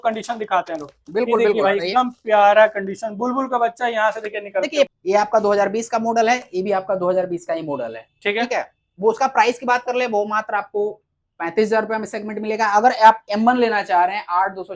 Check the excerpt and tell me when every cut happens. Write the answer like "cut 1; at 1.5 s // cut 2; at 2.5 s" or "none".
cut 1; at 4.9 s